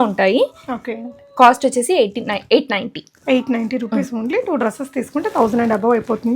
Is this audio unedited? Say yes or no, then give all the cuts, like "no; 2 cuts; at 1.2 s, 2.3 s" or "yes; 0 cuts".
yes; 0 cuts